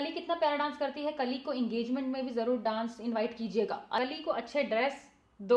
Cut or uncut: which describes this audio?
cut